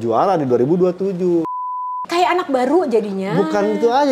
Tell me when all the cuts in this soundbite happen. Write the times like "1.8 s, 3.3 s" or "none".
1.9 s